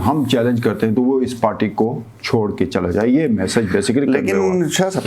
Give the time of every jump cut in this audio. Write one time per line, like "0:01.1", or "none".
none